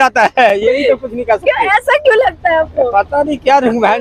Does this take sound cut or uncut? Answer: uncut